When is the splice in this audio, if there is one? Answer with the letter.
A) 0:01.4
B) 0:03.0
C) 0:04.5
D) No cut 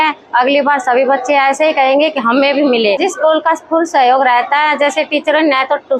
B